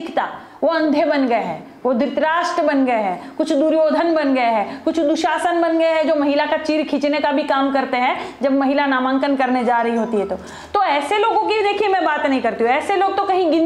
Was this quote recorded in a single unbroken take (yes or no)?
yes